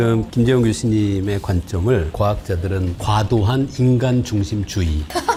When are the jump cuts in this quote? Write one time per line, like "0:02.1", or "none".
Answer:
none